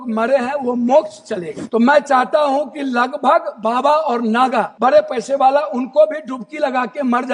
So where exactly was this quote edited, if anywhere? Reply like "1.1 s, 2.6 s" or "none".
1.5 s, 4.7 s